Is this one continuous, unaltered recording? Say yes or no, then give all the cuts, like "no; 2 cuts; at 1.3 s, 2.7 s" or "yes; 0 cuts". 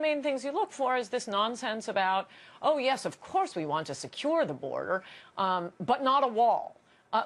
no; 1 cut; at 2.1 s